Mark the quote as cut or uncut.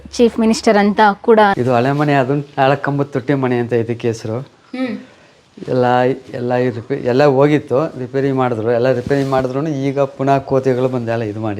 cut